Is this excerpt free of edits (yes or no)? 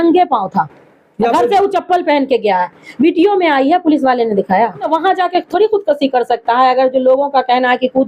no